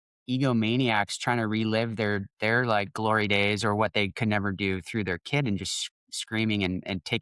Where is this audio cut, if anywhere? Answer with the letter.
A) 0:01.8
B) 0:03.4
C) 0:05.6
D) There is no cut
D